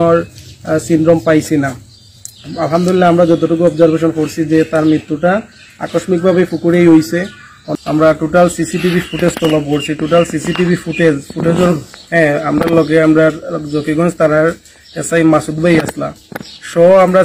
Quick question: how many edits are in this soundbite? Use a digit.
1